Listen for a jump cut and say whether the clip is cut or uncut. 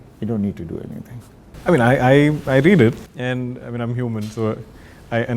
uncut